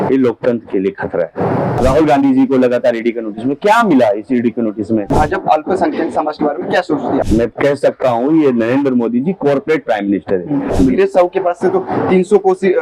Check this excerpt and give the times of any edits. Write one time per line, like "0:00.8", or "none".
0:01.8
0:05.1
0:07.3
0:10.7